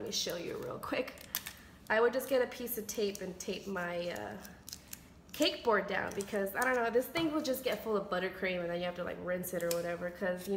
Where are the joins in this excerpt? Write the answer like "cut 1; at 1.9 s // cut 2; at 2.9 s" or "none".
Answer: none